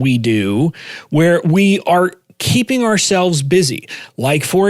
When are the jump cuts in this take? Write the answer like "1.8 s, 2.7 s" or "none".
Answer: 1.4 s